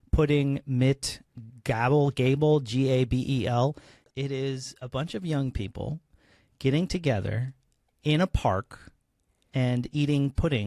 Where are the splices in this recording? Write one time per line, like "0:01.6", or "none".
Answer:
0:03.9